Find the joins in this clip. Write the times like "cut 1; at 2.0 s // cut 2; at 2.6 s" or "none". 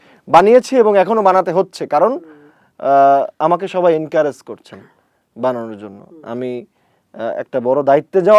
none